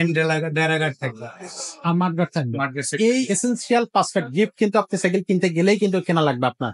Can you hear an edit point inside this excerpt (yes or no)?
no